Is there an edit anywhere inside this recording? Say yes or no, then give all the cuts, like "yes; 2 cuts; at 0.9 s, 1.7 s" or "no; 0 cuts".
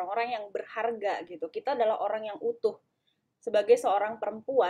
no; 0 cuts